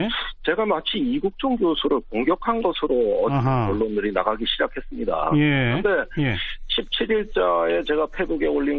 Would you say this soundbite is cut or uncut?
uncut